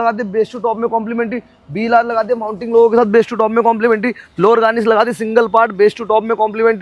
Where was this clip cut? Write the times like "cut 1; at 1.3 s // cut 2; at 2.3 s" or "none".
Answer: none